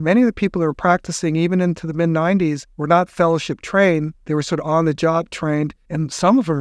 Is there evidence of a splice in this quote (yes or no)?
yes